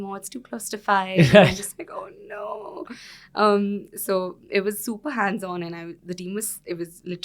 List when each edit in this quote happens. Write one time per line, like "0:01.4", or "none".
none